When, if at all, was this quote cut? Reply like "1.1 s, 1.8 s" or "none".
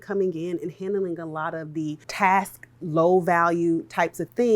2.1 s

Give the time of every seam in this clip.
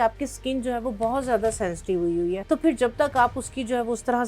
2.4 s

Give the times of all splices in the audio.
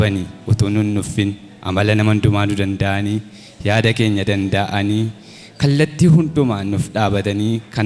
none

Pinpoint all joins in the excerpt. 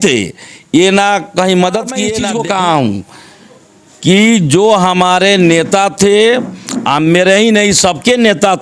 2.1 s

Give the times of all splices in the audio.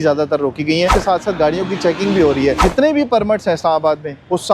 1.0 s, 2.6 s

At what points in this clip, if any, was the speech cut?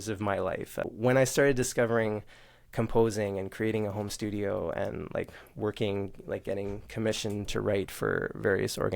0.9 s

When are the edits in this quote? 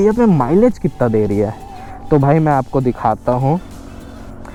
none

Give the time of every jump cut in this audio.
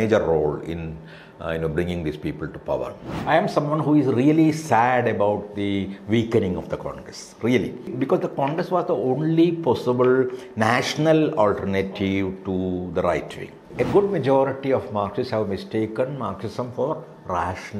3.1 s, 7.9 s, 13.7 s

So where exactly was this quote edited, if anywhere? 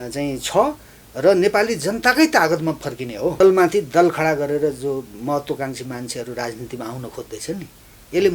3.4 s

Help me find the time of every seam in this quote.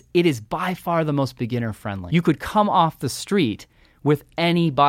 2.0 s

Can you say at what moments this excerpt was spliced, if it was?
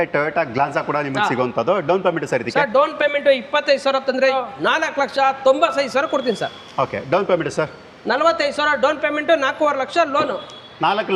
4.3 s

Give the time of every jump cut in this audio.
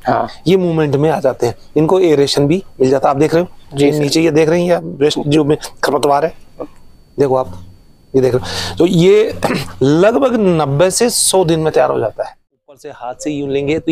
12.5 s

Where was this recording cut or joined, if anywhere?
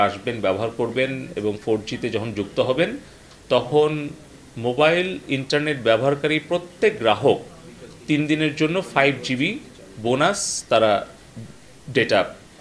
none

